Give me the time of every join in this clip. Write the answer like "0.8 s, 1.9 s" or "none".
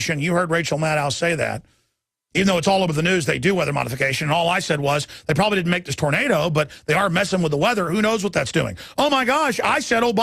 none